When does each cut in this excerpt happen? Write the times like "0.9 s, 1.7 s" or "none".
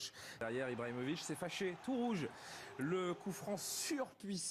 3.1 s